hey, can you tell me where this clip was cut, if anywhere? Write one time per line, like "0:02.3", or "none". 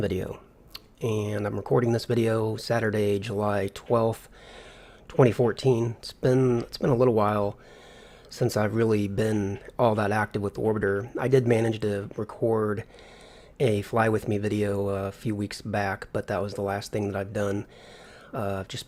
none